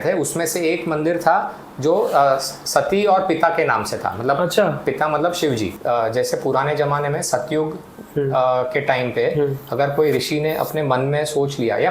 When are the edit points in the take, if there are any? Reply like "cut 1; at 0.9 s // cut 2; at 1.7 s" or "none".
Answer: cut 1; at 5.7 s